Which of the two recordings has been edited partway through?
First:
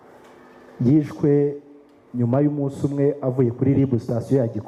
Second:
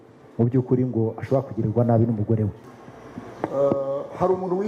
second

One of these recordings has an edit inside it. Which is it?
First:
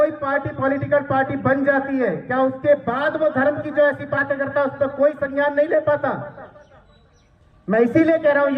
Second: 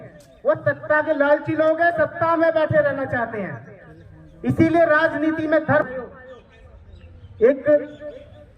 second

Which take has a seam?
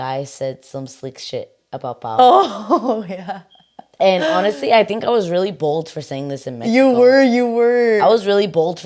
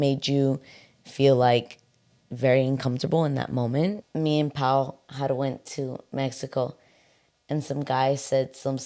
second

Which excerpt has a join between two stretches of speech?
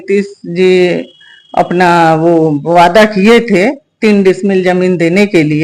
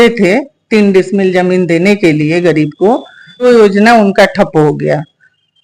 second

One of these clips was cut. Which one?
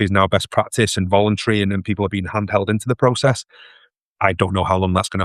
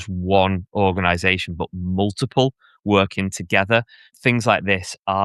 second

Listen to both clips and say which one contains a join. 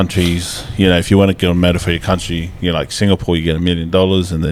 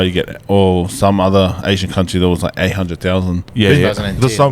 second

